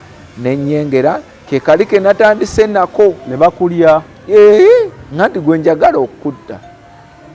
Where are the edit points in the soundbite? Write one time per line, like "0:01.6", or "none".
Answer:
none